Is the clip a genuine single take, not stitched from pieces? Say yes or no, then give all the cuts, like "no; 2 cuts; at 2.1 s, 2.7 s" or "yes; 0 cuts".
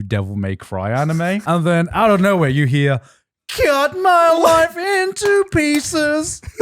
no; 1 cut; at 1.4 s